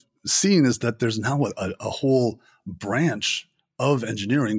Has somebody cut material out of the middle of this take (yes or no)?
no